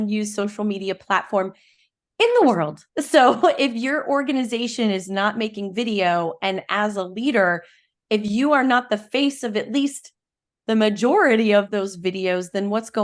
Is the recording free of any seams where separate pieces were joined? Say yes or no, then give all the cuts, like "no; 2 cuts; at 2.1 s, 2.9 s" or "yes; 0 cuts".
no; 1 cut; at 11.7 s